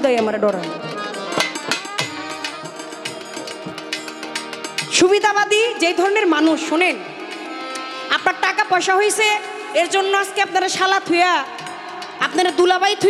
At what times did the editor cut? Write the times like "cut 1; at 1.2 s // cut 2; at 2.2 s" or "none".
cut 1; at 2.7 s

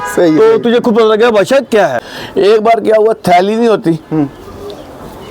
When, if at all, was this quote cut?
cut 1; at 2.0 s

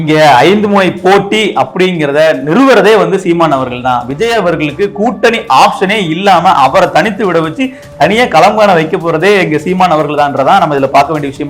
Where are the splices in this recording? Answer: none

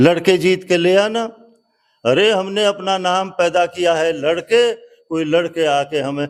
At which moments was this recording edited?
none

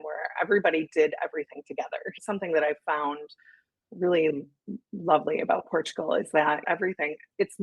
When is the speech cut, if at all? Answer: cut 1; at 2.1 s // cut 2; at 6.6 s

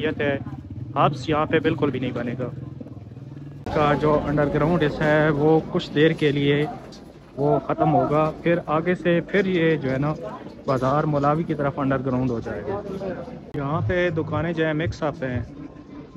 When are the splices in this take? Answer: cut 1; at 3.7 s // cut 2; at 13.3 s

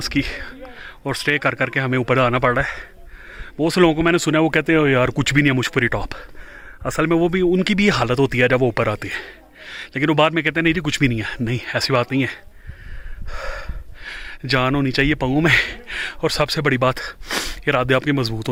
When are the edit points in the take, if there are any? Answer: none

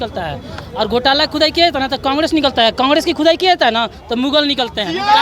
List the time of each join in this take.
none

